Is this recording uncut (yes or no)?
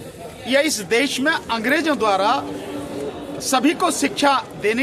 yes